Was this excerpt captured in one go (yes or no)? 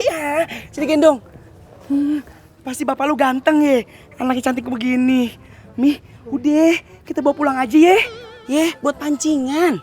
no